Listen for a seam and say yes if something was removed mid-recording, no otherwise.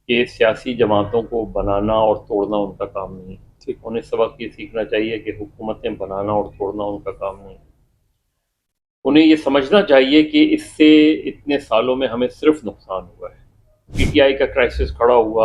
yes